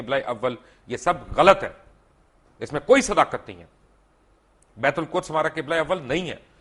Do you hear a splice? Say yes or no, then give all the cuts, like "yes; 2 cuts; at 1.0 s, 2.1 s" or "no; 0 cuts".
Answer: no; 0 cuts